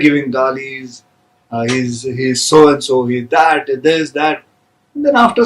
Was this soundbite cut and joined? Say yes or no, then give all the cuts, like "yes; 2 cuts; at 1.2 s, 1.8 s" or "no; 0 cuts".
no; 0 cuts